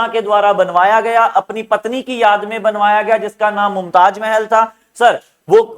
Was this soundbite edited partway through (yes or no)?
no